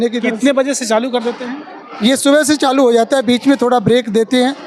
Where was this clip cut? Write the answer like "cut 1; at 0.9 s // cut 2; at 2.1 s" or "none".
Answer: none